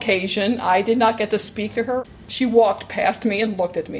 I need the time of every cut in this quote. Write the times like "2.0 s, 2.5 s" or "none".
2.2 s